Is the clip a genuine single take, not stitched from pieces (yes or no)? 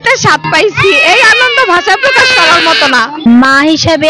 no